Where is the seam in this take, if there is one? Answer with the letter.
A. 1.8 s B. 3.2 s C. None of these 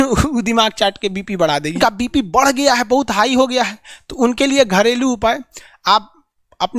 A